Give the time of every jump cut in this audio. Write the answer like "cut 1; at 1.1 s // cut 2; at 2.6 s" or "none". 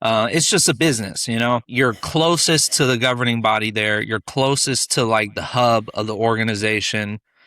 cut 1; at 1.7 s